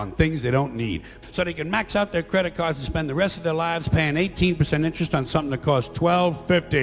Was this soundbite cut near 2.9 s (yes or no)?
no